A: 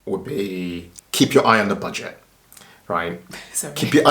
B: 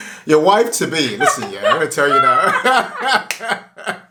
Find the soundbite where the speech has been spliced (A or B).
A